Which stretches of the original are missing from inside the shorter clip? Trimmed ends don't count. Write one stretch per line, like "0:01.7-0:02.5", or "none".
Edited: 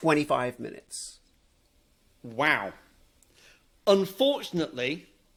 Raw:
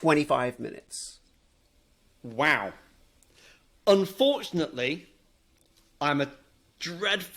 none